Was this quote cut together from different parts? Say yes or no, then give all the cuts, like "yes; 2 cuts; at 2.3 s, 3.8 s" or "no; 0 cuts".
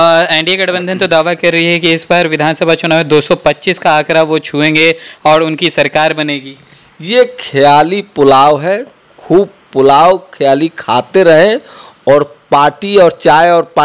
no; 0 cuts